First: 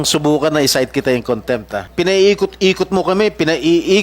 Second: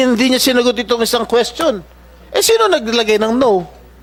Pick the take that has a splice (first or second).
first